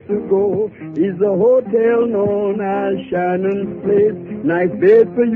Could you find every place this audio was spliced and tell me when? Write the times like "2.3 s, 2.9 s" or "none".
3.3 s